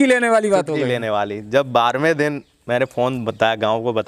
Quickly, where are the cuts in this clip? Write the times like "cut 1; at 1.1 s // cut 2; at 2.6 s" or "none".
none